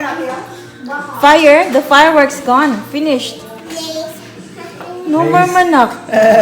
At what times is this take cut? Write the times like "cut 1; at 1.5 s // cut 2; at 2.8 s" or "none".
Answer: none